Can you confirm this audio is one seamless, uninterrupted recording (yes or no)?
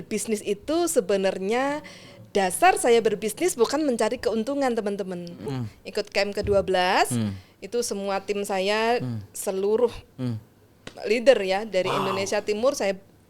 no